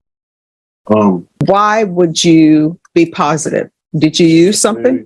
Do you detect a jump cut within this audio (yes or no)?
yes